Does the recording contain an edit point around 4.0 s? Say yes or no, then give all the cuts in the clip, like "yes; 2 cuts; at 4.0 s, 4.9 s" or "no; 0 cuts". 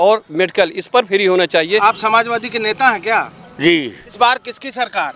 yes; 2 cuts; at 1.7 s, 4.0 s